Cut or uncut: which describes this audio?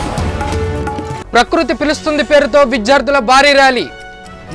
cut